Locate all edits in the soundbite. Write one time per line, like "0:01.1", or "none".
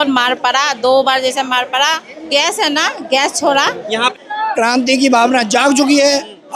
0:02.3
0:04.1